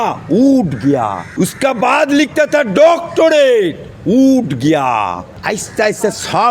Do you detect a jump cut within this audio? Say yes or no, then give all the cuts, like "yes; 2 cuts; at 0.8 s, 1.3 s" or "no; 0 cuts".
yes; 2 cuts; at 1.2 s, 5.3 s